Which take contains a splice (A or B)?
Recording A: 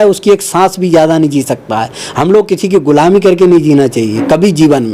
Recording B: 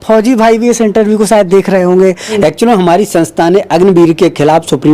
B